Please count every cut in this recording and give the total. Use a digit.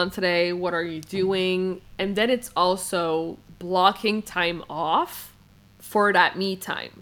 0